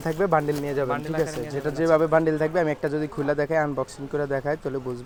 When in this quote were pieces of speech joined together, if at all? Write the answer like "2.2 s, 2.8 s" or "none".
none

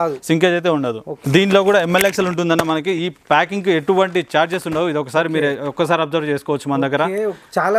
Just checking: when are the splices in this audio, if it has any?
1.2 s

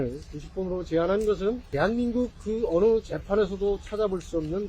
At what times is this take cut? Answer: 1.6 s

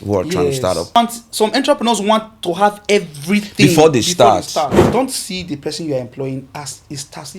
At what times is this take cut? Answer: 1.0 s, 4.7 s

